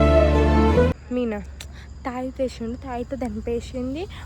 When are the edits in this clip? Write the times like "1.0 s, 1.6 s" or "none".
0.9 s